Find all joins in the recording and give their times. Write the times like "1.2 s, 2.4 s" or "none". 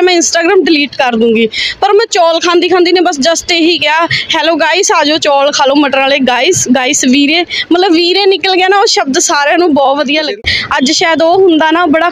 10.4 s